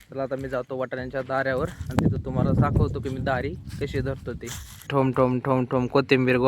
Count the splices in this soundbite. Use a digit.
1